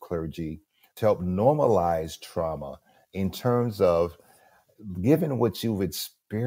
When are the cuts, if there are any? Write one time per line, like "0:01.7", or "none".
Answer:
0:00.9